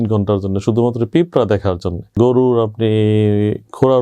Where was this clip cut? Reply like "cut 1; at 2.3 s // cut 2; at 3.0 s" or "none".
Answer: cut 1; at 2.1 s